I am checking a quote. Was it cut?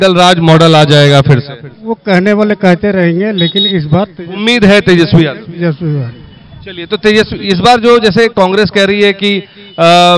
no; 0 cuts

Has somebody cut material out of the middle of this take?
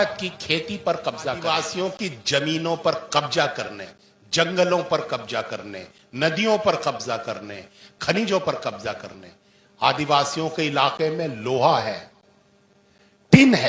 yes; 1 cut; at 1.5 s

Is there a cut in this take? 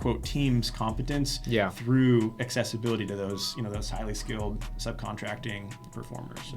no; 0 cuts

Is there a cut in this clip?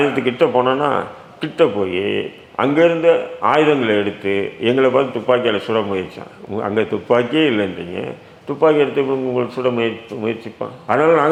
no; 0 cuts

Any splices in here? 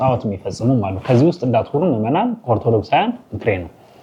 no; 0 cuts

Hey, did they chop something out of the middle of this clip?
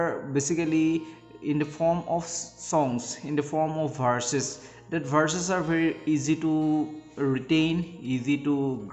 no; 0 cuts

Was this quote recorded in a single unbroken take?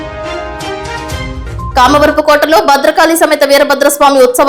yes; 0 cuts

